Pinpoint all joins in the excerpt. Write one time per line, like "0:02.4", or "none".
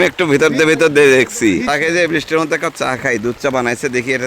0:01.6